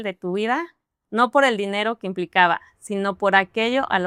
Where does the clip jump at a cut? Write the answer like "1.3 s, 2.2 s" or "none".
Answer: none